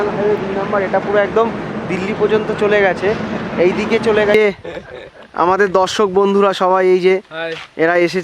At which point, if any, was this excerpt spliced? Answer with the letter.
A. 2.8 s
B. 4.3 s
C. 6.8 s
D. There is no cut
B